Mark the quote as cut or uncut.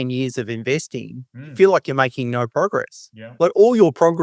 uncut